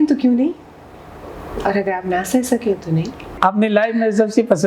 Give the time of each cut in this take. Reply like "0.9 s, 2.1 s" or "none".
3.4 s